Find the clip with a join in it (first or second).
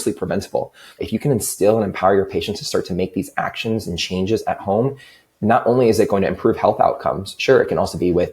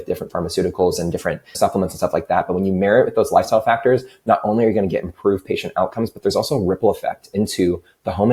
first